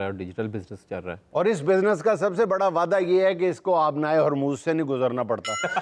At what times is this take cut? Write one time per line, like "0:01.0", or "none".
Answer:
0:01.2